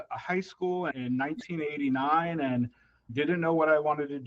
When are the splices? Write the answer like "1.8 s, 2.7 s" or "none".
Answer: 0.9 s, 3.1 s